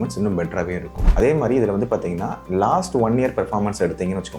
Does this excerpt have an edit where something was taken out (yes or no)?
yes